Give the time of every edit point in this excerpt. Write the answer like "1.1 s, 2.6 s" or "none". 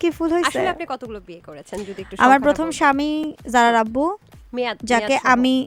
none